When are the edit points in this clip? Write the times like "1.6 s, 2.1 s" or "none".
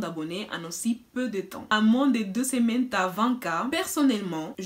1.7 s, 3.7 s